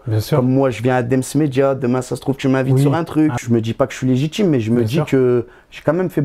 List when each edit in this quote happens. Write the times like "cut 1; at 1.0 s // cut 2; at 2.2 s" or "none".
cut 1; at 3.4 s